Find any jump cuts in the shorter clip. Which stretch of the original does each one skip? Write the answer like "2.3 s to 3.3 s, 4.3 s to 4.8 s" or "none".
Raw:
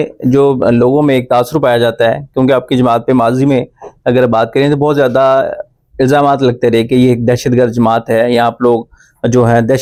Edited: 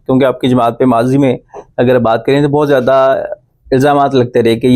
none